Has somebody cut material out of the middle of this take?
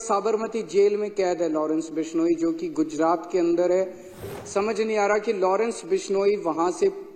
yes; 1 cut; at 4.2 s

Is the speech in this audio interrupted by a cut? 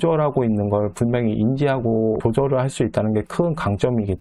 no; 0 cuts

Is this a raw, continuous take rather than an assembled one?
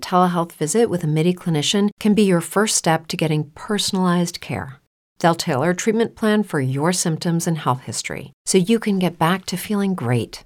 yes; 0 cuts

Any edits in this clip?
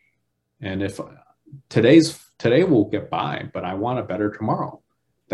no; 0 cuts

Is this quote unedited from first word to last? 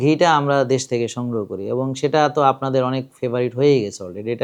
yes; 0 cuts

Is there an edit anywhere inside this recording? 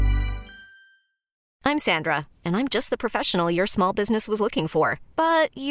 yes; 1 cut; at 1.5 s

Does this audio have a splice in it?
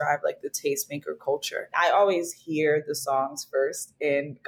yes; 1 cut; at 1.7 s

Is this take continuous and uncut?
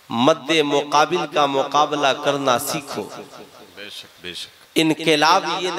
no; 1 cut; at 4.5 s

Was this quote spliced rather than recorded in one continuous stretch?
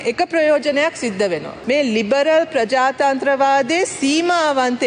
yes; 1 cut; at 1.5 s

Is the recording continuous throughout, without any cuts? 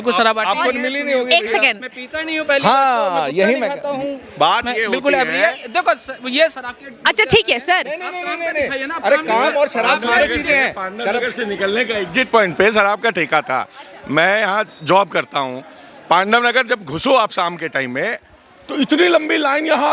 yes; 0 cuts

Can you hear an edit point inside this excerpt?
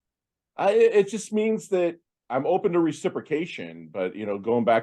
no; 0 cuts

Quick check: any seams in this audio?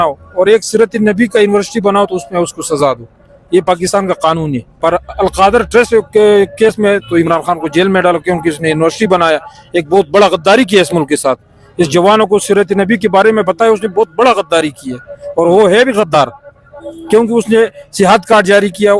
yes; 1 cut; at 4.7 s

